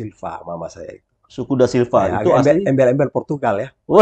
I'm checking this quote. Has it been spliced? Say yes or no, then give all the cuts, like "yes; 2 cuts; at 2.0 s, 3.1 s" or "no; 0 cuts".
no; 0 cuts